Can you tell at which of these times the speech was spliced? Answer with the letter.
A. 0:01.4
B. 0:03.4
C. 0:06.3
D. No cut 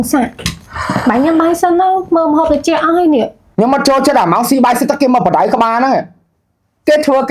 B